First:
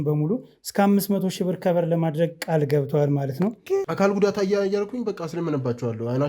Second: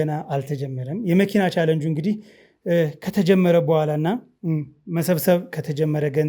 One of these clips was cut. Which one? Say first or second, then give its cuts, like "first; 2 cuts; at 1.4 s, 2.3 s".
first; 1 cut; at 3.7 s